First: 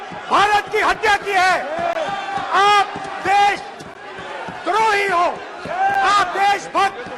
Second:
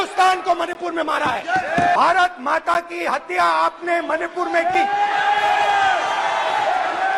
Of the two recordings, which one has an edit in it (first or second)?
second